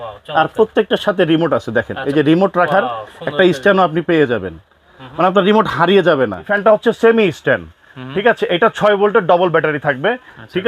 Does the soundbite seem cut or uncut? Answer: cut